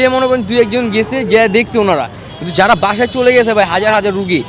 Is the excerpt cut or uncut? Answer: uncut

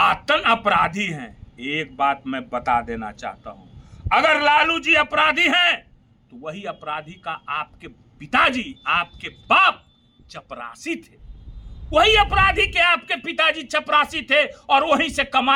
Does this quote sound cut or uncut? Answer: uncut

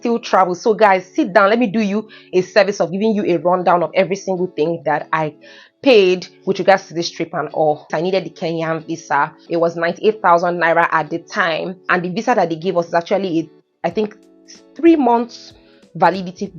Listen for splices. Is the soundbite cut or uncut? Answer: cut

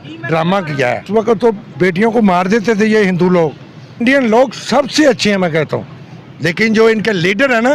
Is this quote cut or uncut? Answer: cut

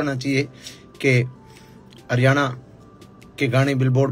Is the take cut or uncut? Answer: uncut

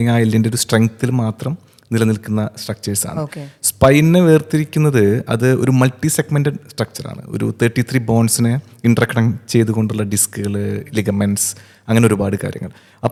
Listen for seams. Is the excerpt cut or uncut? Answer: uncut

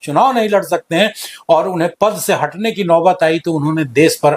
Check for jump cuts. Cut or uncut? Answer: uncut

